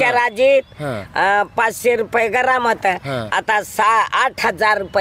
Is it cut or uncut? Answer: uncut